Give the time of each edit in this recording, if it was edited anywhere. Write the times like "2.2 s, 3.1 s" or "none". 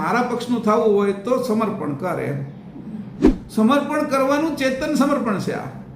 3.4 s